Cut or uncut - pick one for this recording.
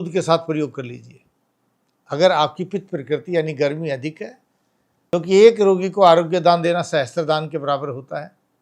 cut